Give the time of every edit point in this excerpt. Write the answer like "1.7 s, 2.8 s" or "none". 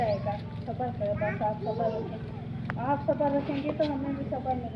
none